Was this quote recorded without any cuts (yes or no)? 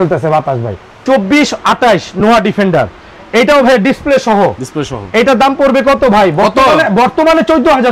no